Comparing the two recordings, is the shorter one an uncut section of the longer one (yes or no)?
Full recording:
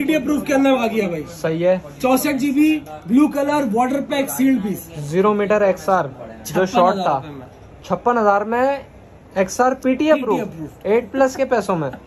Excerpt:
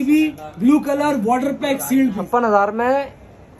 no